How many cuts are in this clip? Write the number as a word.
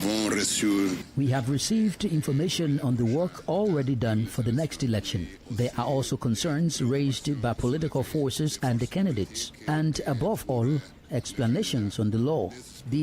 one